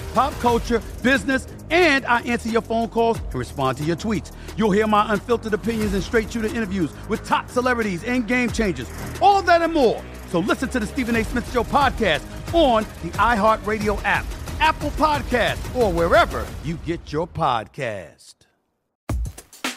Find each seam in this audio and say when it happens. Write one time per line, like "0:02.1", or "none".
0:18.8